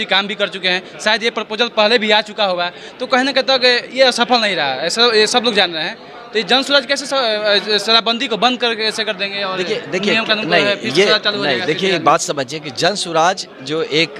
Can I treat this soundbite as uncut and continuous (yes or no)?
yes